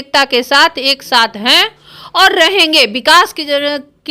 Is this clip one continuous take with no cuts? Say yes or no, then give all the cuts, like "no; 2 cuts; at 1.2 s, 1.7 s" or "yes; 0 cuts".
yes; 0 cuts